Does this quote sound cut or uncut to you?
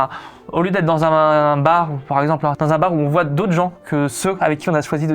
cut